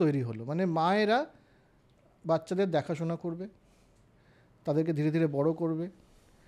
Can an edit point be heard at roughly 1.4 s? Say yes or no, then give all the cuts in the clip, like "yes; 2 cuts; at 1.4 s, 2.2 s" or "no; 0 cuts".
no; 0 cuts